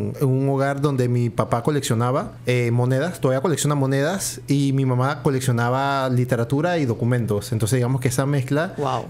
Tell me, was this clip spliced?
yes; 1 cut; at 2.3 s

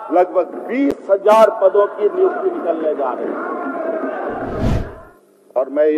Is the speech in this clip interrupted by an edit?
yes; 1 cut; at 4.8 s

